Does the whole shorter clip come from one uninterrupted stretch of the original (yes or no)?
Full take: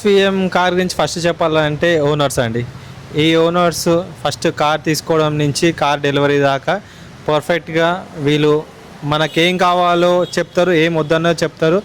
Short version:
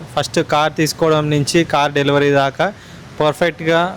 yes